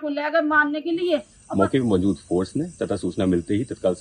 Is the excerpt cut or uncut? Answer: cut